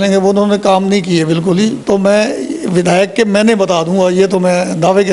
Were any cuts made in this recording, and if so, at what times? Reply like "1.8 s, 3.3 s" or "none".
1.8 s